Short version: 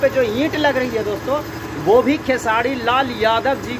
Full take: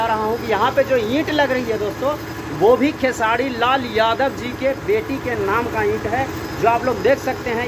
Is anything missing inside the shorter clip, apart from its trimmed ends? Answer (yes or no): no